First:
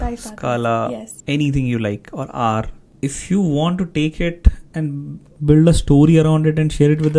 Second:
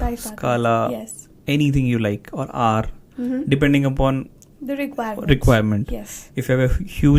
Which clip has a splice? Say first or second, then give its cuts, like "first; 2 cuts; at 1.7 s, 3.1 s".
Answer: first; 3 cuts; at 1.1 s, 2.8 s, 4.9 s